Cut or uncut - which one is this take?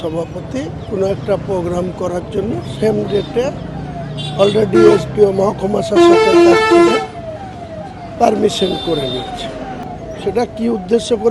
cut